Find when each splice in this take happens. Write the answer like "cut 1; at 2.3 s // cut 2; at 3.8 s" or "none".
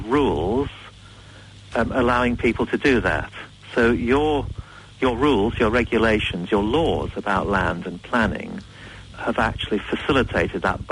none